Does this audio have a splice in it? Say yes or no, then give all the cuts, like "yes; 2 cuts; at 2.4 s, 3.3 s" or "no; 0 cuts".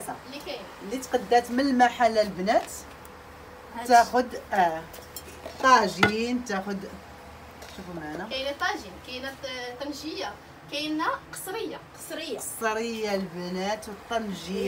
no; 0 cuts